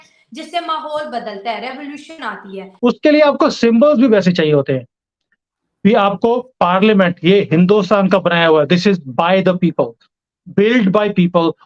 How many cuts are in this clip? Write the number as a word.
one